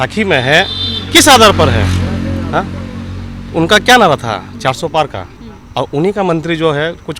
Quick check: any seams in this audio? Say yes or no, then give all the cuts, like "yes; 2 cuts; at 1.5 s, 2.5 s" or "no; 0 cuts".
no; 0 cuts